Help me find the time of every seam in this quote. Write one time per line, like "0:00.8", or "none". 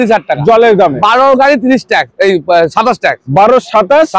none

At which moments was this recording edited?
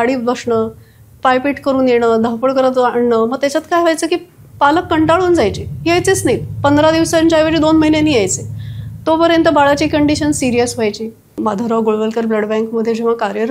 0:11.3

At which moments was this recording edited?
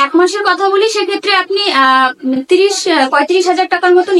none

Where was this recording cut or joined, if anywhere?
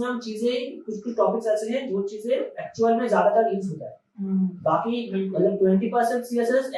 none

